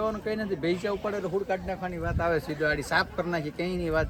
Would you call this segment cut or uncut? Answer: uncut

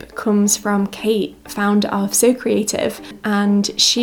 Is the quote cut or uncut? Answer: uncut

